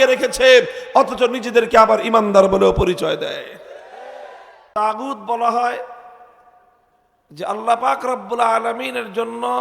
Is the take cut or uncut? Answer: cut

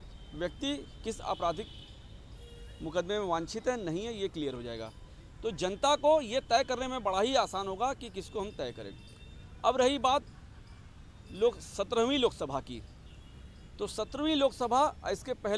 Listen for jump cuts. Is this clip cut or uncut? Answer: uncut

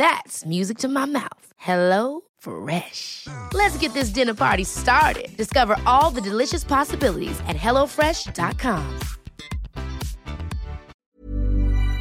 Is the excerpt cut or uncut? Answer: cut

